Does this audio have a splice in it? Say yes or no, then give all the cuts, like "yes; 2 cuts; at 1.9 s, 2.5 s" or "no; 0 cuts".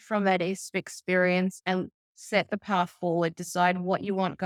no; 0 cuts